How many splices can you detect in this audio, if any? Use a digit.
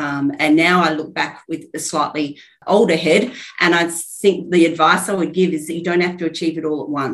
1